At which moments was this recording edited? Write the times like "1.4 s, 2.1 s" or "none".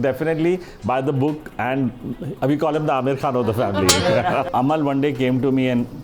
4.4 s